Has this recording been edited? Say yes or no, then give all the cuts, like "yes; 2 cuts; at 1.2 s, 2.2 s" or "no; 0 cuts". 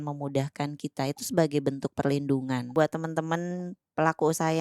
yes; 1 cut; at 2.7 s